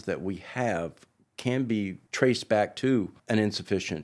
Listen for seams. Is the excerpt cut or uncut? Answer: cut